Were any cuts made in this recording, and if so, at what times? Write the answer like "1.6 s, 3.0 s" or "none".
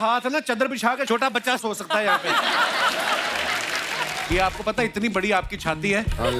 4.1 s